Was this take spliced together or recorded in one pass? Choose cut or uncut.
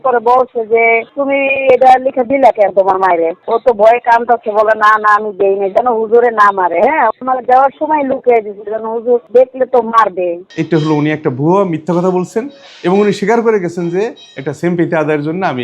cut